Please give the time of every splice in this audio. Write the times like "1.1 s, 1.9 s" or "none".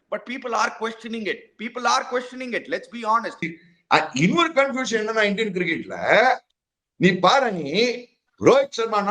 3.6 s